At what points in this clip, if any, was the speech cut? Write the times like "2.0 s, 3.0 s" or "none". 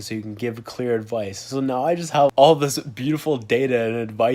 2.3 s